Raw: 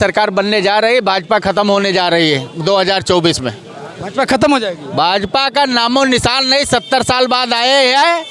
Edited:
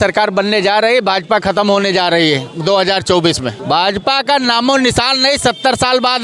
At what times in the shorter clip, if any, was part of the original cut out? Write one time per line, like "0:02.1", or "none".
0:03.6